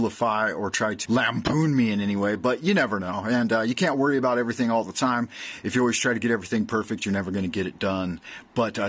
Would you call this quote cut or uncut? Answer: cut